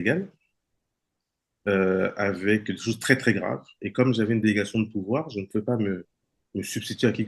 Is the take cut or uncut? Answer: uncut